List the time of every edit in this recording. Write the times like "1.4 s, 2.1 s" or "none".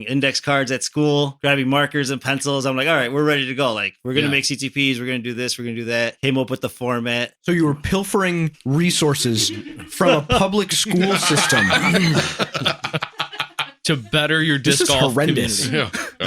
1.3 s, 6.2 s